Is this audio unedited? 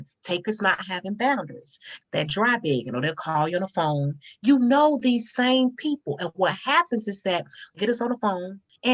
yes; 0 cuts

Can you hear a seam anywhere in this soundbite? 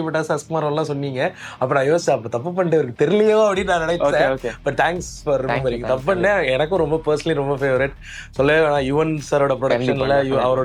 no; 0 cuts

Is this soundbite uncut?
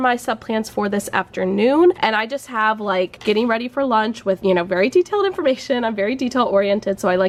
yes; 0 cuts

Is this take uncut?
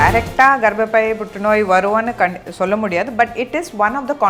yes; 0 cuts

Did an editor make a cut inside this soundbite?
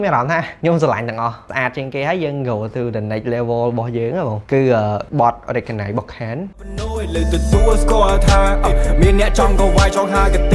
yes; 1 cut; at 1.4 s

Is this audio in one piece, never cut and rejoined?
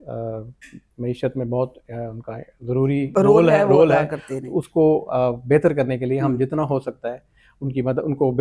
yes; 0 cuts

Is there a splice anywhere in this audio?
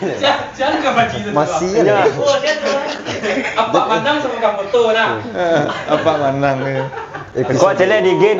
no; 0 cuts

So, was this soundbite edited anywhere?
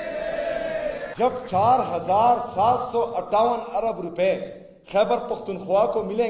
yes; 1 cut; at 1.1 s

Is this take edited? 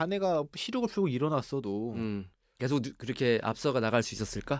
yes; 1 cut; at 2.4 s

